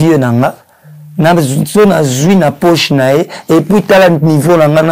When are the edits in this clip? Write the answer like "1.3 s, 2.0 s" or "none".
none